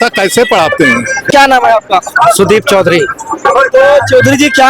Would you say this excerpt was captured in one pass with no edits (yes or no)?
no